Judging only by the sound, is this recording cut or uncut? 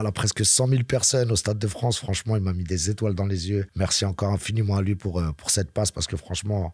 uncut